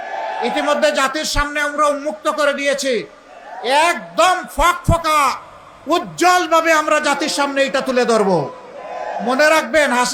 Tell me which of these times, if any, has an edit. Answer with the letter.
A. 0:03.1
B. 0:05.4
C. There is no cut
C